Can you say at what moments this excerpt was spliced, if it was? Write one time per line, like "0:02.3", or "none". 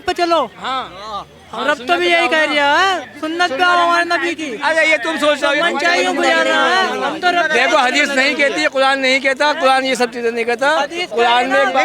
none